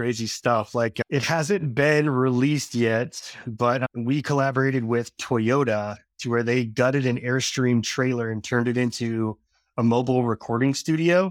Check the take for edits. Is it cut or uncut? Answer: cut